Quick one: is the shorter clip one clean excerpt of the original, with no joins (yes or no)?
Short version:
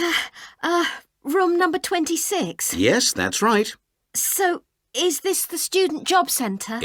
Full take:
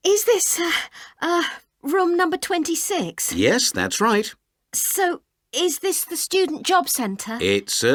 yes